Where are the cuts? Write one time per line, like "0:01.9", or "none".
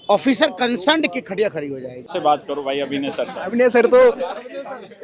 0:02.1

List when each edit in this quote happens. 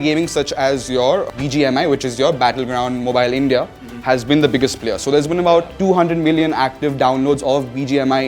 0:01.3
0:05.7

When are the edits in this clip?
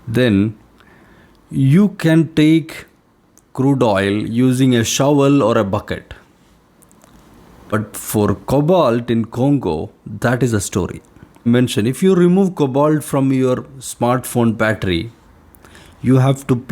0:07.7
0:11.5

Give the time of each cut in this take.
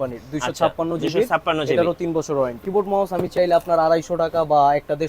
0:02.6

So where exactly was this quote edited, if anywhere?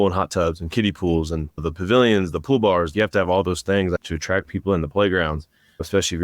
0:02.9

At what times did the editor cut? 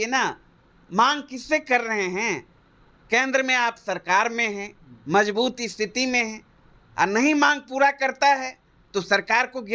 none

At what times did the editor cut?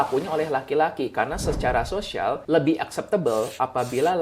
0:02.4

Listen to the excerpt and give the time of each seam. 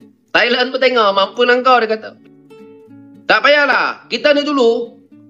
0:02.1

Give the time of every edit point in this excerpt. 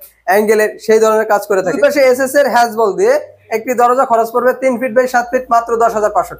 0:01.7

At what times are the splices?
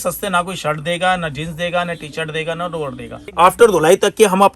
0:03.3

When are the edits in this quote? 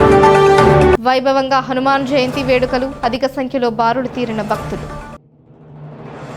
0:00.9

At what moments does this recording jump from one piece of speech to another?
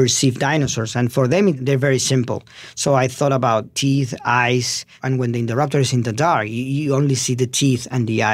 0:01.6
0:03.7
0:05.0

